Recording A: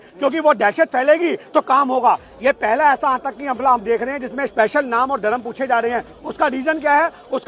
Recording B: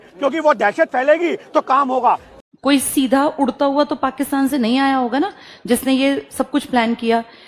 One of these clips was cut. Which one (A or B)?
B